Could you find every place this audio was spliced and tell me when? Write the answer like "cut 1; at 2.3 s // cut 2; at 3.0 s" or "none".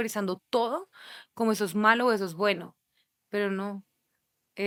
none